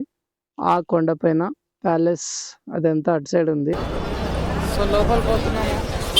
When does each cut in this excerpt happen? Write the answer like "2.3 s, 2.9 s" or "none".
3.8 s